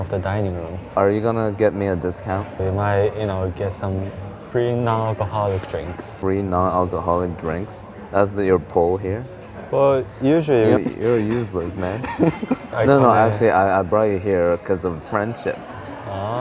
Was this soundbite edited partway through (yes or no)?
yes